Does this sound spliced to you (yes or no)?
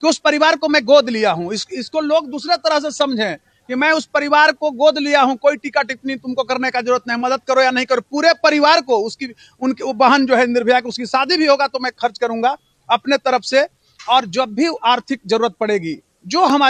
no